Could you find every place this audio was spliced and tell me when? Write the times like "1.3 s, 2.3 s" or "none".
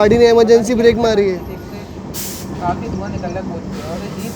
none